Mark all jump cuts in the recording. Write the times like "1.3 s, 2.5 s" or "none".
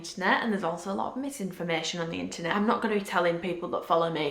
2.5 s

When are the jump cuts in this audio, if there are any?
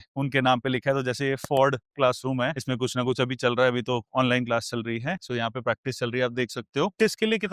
5.2 s

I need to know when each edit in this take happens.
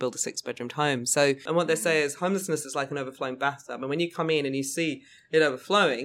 1.4 s

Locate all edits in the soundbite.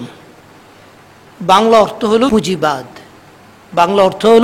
2.3 s

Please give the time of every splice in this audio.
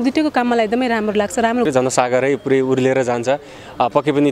1.7 s

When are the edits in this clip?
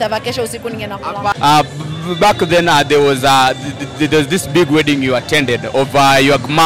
1.3 s

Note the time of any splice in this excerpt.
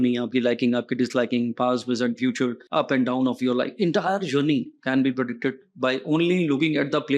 2.6 s

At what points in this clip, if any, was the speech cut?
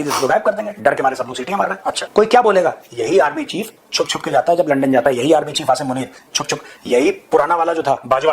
2.0 s

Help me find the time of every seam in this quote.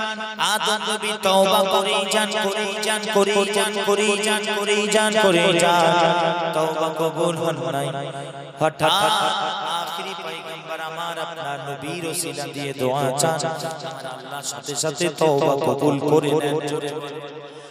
none

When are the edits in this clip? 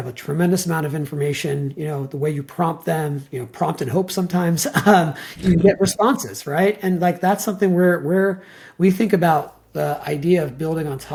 none

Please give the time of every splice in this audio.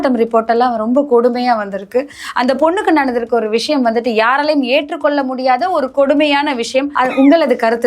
6.9 s

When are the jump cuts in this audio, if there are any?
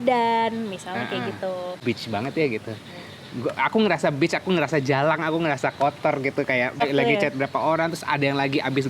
1.8 s, 6.8 s

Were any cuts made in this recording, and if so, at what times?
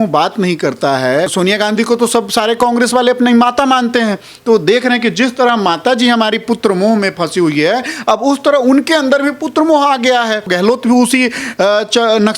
1.3 s, 10.5 s

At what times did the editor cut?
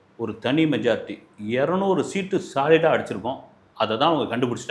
none

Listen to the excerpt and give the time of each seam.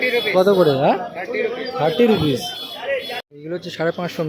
3.2 s

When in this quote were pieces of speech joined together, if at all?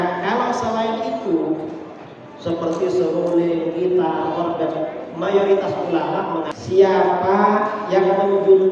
6.5 s

